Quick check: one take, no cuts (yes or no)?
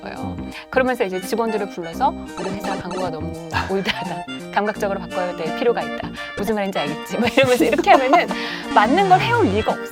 yes